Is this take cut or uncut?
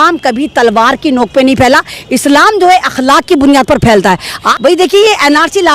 cut